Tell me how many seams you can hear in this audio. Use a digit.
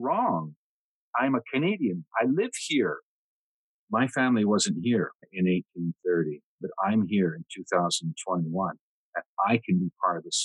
4